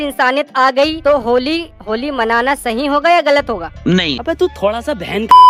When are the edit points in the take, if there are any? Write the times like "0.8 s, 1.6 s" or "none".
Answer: none